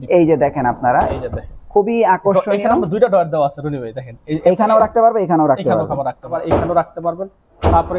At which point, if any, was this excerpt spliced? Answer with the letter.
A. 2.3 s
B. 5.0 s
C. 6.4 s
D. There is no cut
C